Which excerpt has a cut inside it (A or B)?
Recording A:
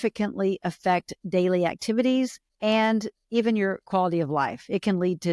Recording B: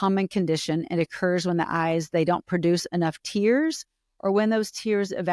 A